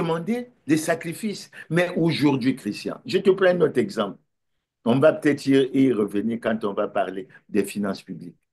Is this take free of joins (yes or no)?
yes